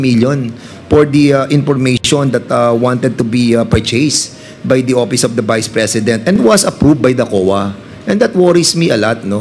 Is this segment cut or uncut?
uncut